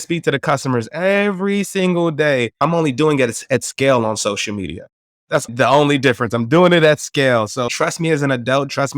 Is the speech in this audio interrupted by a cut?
yes; 3 cuts; at 2.6 s, 5.5 s, 7.7 s

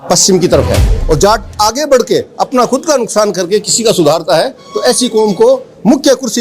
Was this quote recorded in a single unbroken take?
no; 1 cut; at 0.9 s

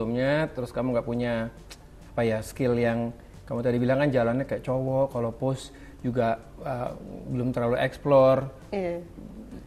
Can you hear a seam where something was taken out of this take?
no; 0 cuts

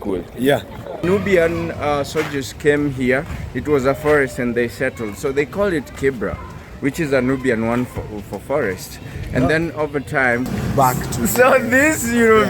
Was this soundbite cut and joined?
yes; 2 cuts; at 1.0 s, 10.5 s

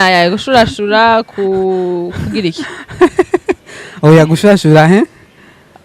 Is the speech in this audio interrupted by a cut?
no; 0 cuts

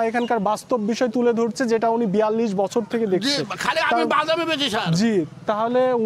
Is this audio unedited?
yes; 0 cuts

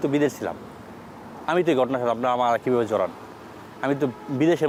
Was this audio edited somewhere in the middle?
no; 0 cuts

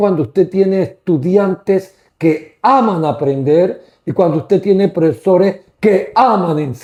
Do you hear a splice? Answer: no; 0 cuts

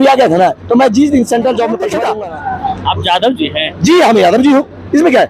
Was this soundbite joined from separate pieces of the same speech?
yes; 1 cut; at 2.0 s

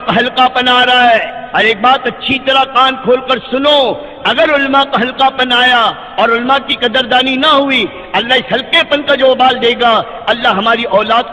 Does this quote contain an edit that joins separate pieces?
yes; 1 cut; at 1.4 s

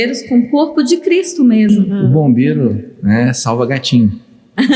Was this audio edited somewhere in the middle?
yes; 1 cut; at 1.7 s

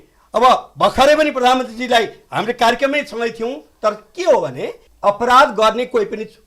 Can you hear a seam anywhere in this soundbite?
no; 0 cuts

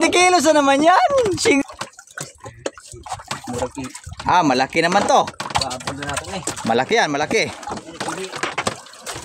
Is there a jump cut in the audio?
yes; 1 cut; at 1.6 s

